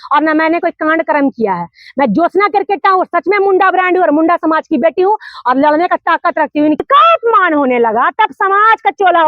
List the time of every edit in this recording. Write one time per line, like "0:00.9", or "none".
0:06.8